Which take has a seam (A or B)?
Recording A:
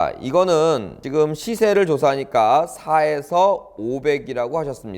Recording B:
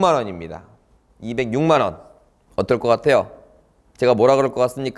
A